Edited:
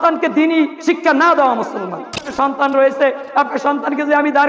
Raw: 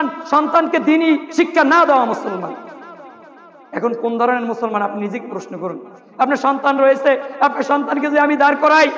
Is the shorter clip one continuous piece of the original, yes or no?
no